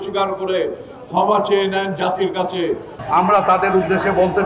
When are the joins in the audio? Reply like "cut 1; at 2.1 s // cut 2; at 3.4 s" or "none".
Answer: cut 1; at 2.9 s